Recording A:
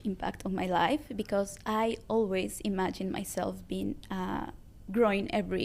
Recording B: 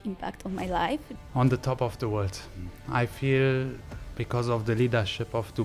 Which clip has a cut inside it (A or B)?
B